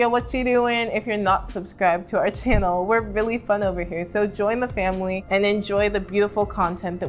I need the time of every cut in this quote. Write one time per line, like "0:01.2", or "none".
none